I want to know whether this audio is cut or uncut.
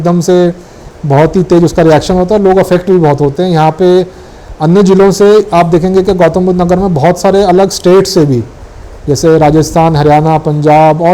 uncut